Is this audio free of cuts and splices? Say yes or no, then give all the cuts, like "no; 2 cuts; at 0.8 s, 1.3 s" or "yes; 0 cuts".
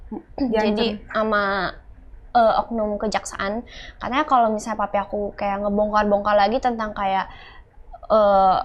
yes; 0 cuts